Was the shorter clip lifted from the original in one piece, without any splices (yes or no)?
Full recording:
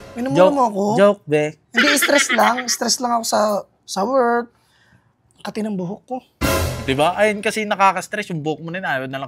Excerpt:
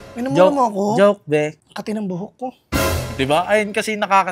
no